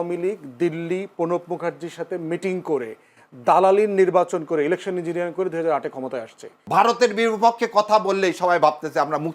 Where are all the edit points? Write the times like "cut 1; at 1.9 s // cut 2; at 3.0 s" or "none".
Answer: cut 1; at 6.5 s